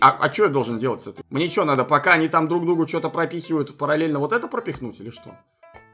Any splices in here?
yes; 1 cut; at 1.1 s

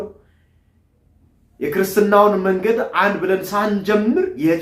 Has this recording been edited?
no; 0 cuts

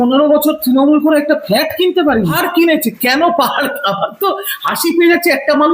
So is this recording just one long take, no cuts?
no; 1 cut; at 2.3 s

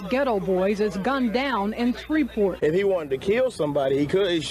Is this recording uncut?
no; 1 cut; at 2.6 s

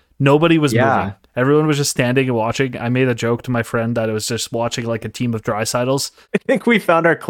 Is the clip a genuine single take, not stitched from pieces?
no; 1 cut; at 6.2 s

